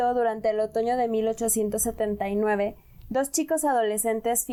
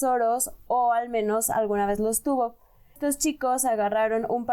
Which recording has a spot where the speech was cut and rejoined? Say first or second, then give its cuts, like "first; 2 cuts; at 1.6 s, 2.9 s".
second; 1 cut; at 3.0 s